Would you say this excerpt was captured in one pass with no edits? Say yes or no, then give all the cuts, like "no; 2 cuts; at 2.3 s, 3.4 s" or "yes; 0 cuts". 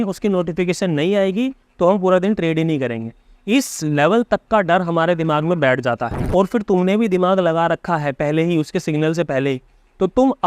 no; 1 cut; at 6.1 s